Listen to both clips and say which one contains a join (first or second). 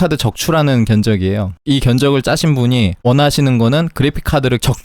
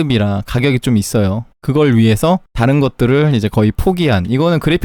first